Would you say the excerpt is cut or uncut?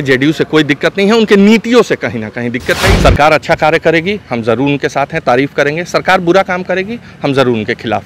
cut